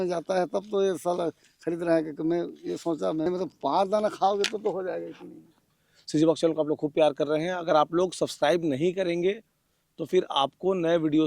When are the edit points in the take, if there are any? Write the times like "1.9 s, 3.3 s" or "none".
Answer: 3.3 s, 5.9 s